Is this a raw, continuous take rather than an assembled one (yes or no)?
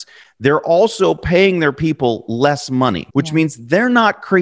no